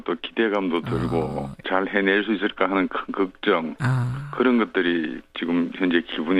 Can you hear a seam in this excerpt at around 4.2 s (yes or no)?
yes